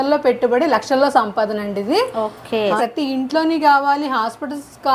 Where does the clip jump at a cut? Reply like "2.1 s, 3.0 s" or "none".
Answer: 2.8 s